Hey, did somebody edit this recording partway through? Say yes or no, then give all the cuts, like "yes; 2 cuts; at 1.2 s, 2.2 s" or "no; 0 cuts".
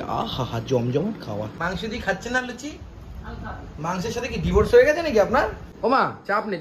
yes; 2 cuts; at 1.6 s, 5.7 s